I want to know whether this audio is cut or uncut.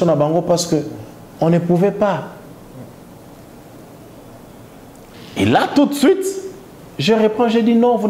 cut